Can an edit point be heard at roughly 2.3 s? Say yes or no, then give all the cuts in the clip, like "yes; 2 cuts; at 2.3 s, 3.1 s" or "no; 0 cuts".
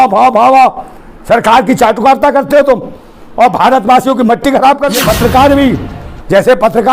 no; 1 cut; at 5.0 s